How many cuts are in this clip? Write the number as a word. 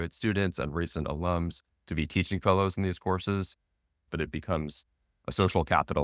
one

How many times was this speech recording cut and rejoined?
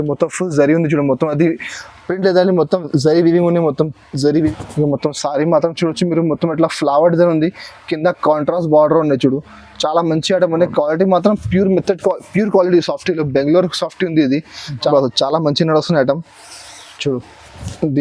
two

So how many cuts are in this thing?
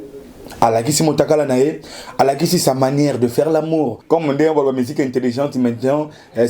one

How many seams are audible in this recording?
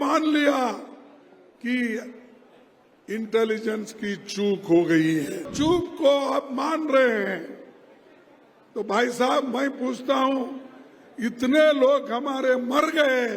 one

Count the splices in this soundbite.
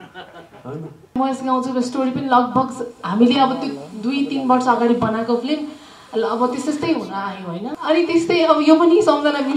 two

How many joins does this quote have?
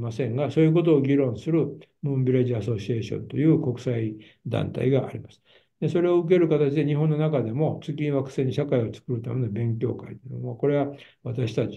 zero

